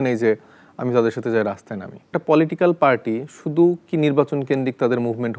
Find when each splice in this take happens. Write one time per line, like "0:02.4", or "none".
0:02.2